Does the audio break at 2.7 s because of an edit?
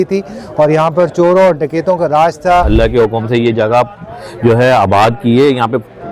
yes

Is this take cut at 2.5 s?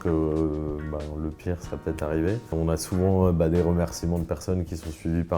yes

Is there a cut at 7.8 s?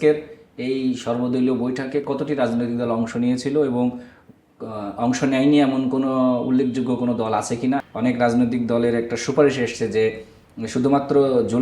yes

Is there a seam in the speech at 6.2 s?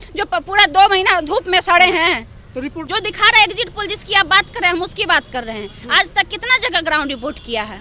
no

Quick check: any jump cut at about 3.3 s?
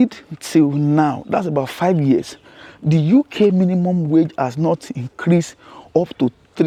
no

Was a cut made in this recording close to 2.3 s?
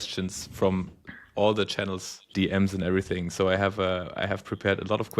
yes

